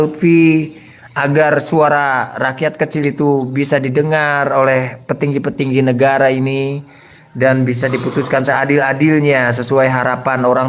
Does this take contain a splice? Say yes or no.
no